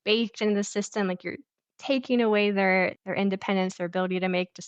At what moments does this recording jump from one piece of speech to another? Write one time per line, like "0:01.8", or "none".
0:03.0